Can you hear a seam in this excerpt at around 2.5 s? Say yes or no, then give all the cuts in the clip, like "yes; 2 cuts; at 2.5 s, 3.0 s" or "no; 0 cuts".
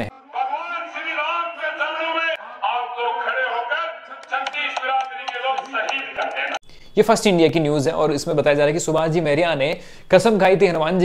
yes; 1 cut; at 2.5 s